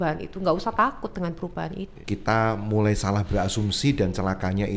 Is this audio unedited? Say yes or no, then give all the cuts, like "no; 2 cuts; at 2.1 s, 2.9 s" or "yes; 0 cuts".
no; 1 cut; at 1.9 s